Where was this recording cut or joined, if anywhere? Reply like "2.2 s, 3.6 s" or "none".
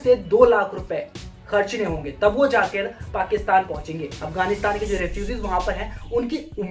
4.2 s

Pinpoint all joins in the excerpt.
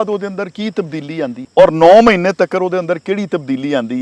1.4 s

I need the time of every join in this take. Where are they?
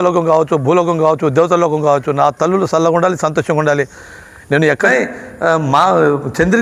4.9 s

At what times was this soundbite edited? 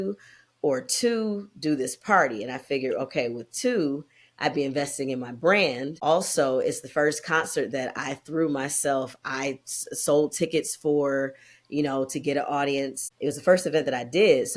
5.9 s, 13.0 s

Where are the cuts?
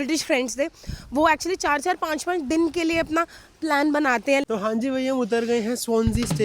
4.4 s

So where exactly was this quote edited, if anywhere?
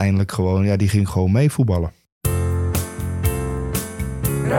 1.9 s

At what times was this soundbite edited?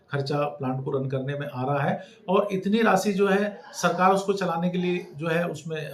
none

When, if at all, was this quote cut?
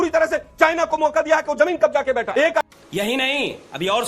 2.7 s

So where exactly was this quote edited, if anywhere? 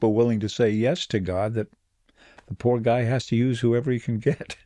none

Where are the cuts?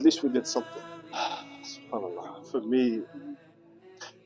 1.0 s

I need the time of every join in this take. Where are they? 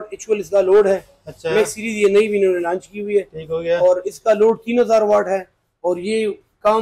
none

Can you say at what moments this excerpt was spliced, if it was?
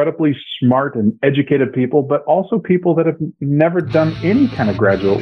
4.2 s

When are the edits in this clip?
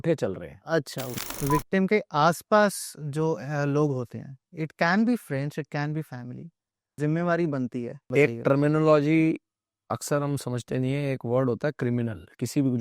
1.0 s, 7.0 s, 8.0 s

